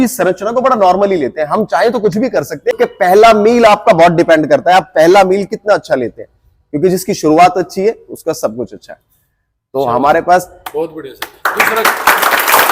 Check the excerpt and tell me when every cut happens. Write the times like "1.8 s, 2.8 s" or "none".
2.8 s